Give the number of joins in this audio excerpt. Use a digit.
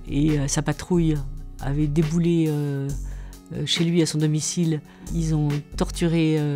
1